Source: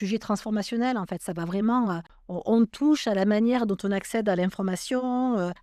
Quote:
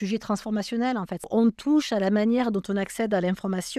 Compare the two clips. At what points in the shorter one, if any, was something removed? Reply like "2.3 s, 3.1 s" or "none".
1.2 s

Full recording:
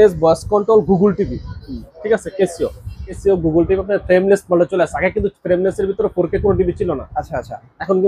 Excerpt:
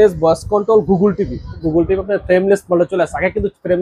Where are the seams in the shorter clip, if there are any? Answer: 1.6 s

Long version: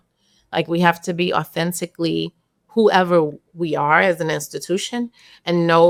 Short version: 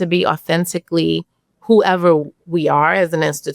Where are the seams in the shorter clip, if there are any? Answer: none

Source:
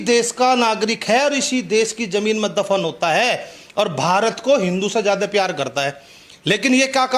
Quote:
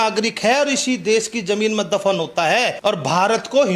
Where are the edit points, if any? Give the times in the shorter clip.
2.7 s

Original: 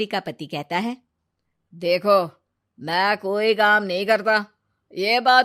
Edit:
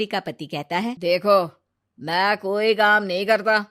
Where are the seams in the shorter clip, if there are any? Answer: 1.0 s

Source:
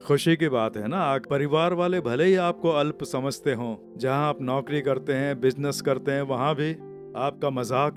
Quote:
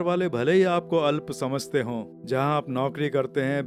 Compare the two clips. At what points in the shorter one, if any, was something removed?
none

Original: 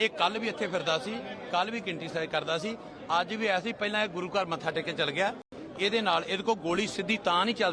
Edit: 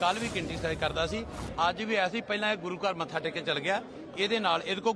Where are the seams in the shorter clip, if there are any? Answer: 4.0 s

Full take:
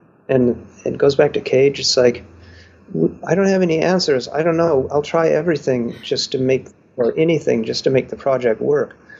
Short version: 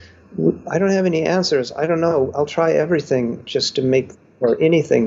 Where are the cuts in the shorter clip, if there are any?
none

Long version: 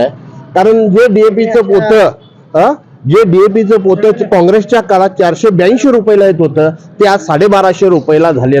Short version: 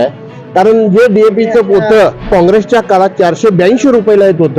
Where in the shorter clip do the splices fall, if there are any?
2.2 s

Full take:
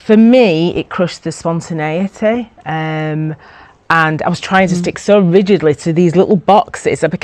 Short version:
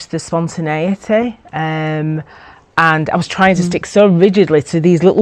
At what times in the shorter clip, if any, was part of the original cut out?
none

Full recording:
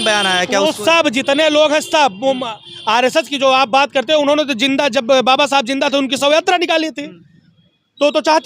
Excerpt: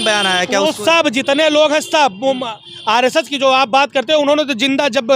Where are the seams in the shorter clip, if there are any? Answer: none

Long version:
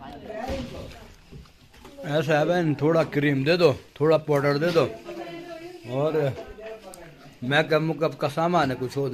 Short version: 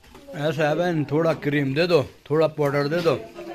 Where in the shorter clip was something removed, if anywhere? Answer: none

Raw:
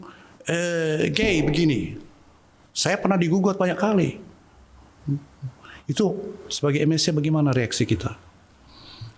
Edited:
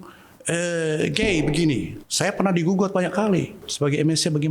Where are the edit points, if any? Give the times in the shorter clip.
2.0 s, 3.6 s

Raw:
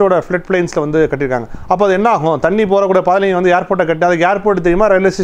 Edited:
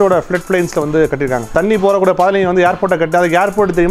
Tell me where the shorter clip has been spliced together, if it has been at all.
1.5 s

